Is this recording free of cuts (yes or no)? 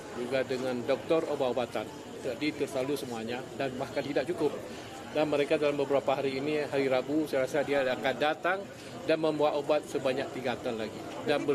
yes